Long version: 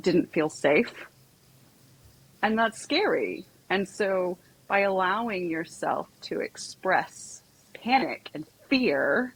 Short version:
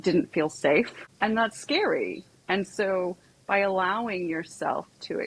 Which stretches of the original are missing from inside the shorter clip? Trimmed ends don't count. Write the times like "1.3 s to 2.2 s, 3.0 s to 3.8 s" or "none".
1.0 s to 2.2 s